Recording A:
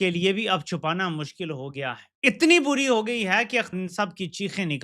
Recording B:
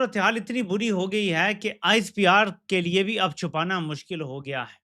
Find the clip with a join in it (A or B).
A